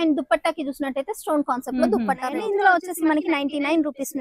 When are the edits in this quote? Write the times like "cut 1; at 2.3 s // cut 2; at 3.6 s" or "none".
cut 1; at 2.3 s